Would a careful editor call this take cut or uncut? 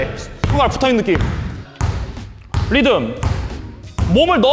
uncut